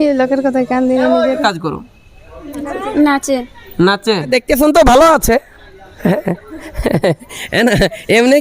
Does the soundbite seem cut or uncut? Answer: cut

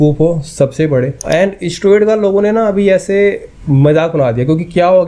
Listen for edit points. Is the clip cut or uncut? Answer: cut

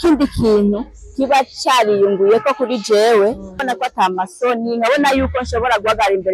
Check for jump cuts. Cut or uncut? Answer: cut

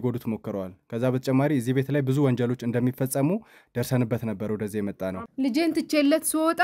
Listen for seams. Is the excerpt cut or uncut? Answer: cut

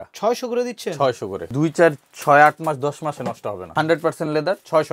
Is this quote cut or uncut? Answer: cut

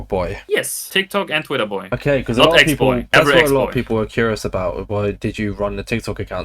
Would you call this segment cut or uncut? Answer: uncut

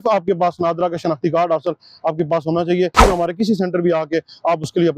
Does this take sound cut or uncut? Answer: cut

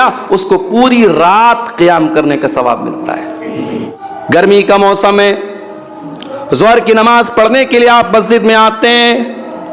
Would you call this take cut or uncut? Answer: cut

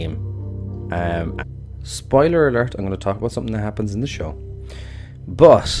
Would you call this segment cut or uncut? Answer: uncut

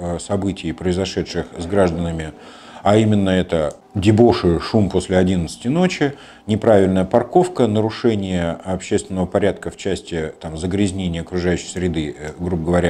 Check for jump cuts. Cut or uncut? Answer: uncut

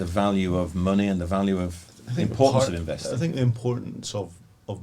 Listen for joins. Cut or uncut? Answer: uncut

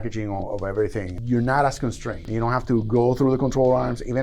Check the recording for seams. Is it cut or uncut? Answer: cut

